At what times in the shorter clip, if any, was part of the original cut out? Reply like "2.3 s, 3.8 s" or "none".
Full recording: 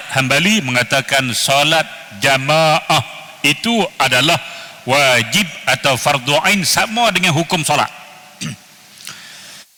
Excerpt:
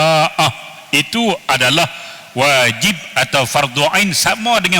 none